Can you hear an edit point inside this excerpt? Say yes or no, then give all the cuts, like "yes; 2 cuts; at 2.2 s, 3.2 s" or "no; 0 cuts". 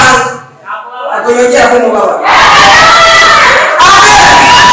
no; 0 cuts